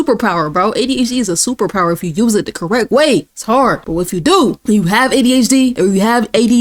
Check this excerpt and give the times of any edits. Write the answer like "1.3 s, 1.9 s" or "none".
none

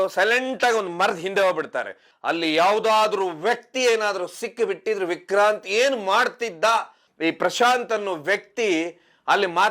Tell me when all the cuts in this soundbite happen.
2.1 s, 7.0 s

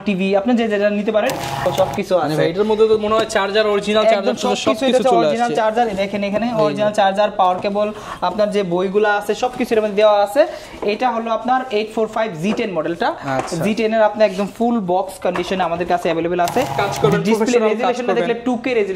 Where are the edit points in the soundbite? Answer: 1.7 s, 16.8 s

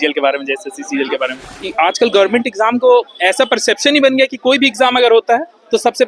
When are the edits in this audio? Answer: 1.5 s

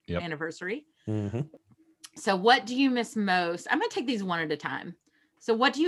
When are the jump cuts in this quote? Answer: 1.5 s

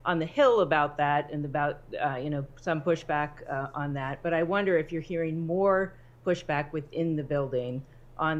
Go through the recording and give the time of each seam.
none

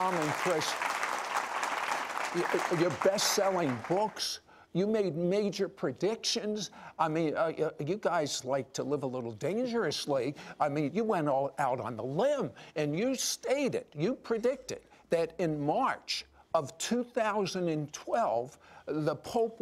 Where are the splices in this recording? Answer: none

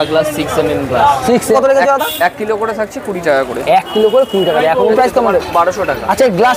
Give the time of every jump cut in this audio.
1.5 s, 5.0 s

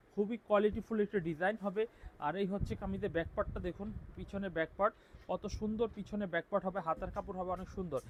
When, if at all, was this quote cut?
none

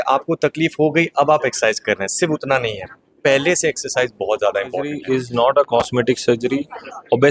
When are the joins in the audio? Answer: 5.0 s

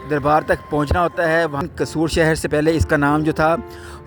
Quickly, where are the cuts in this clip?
1.6 s

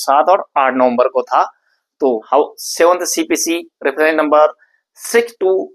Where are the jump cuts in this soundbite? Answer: 2.2 s

